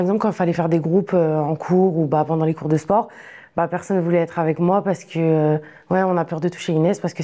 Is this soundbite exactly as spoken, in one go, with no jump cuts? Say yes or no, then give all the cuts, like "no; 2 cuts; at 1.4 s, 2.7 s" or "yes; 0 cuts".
yes; 0 cuts